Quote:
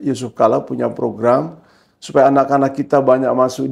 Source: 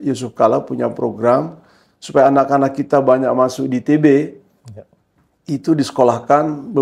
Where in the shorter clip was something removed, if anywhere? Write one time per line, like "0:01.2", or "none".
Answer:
none